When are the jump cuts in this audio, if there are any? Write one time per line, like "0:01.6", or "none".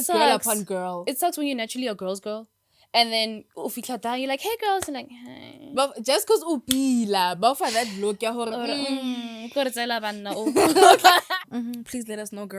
0:11.3